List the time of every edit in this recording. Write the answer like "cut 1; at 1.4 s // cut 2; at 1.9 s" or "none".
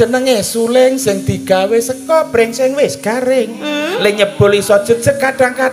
none